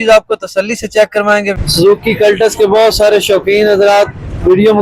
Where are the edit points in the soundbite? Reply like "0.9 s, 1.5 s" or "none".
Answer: 1.6 s